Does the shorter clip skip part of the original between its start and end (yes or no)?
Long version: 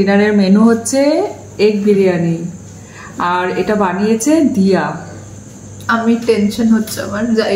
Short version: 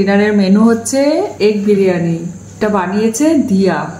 yes